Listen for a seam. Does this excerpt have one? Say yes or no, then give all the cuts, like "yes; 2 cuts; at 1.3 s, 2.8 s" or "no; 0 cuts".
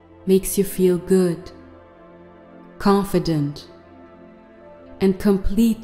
yes; 4 cuts; at 1.5 s, 2.8 s, 3.6 s, 5.0 s